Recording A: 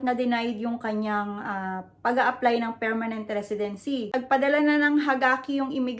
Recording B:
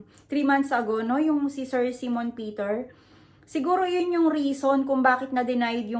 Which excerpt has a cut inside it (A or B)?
A